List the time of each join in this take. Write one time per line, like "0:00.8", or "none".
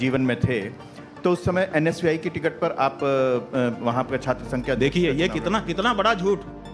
none